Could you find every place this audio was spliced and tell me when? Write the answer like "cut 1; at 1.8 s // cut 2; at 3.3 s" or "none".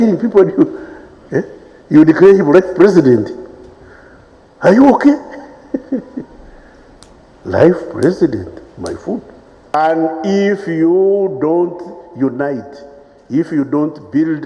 cut 1; at 9.7 s

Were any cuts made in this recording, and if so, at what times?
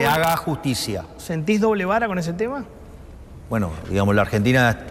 none

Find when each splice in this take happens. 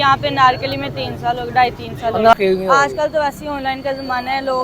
cut 1; at 2.3 s

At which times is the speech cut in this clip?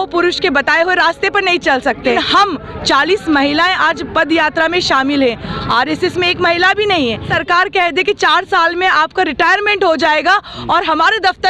cut 1; at 2.1 s // cut 2; at 7.3 s

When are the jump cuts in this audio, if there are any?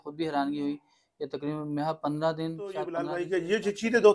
cut 1; at 3.0 s

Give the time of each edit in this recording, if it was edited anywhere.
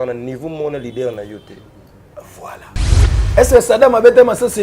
cut 1; at 3.0 s

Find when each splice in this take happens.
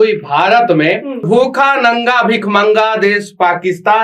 cut 1; at 1.3 s

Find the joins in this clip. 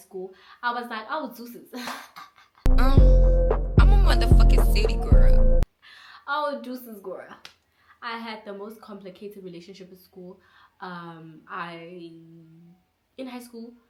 none

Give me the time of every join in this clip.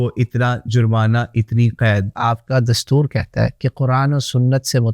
cut 1; at 2.1 s

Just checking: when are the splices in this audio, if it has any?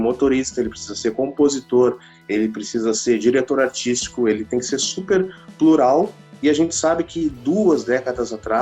none

